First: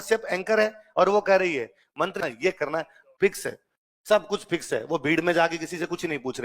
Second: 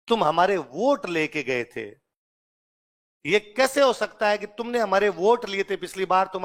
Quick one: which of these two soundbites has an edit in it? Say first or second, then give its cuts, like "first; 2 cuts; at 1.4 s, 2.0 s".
first; 1 cut; at 2.2 s